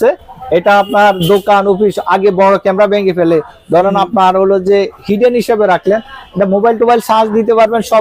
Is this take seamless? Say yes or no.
yes